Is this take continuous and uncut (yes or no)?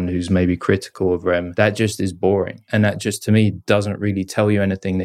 no